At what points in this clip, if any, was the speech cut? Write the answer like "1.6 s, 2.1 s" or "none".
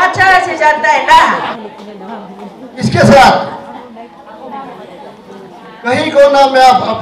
1.5 s